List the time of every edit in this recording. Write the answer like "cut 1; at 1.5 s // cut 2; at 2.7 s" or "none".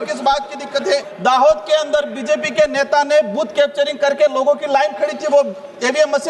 cut 1; at 1.1 s